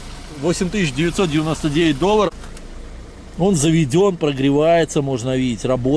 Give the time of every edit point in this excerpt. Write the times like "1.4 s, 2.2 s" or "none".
2.3 s